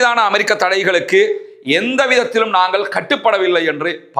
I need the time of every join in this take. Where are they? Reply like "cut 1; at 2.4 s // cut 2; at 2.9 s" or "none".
none